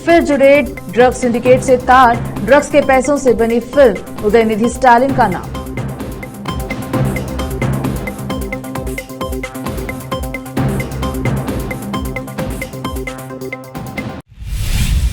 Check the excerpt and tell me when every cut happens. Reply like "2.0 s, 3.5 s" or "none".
14.1 s